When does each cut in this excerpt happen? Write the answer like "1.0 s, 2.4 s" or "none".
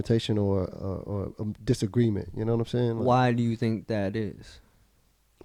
none